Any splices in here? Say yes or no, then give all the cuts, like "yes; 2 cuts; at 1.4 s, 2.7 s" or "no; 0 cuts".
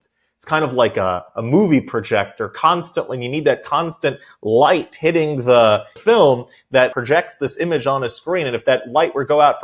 yes; 2 cuts; at 5.9 s, 6.9 s